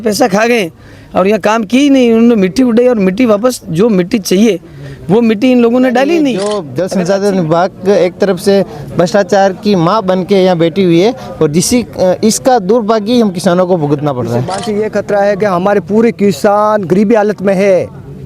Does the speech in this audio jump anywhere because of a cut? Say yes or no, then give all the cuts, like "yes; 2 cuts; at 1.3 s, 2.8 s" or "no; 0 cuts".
yes; 2 cuts; at 6.4 s, 14.7 s